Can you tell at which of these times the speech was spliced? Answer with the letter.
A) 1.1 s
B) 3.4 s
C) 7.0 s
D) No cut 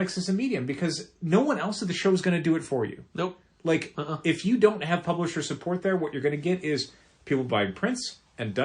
A